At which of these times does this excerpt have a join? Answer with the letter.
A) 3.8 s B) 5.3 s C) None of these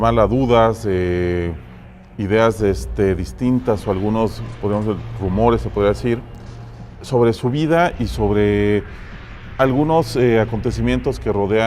A